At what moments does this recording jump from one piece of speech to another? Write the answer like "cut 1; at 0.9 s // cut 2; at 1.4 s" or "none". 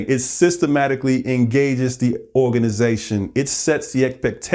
none